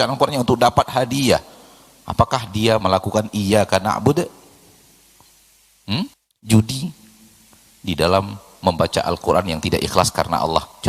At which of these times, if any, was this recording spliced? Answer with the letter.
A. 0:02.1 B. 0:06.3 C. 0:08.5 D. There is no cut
B